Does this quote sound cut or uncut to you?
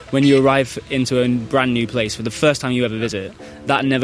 cut